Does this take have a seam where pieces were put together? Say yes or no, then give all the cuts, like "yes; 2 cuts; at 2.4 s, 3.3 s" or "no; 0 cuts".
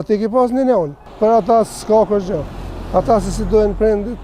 yes; 1 cut; at 1.0 s